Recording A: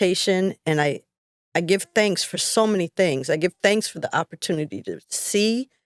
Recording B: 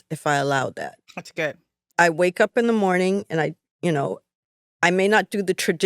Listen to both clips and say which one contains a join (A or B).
B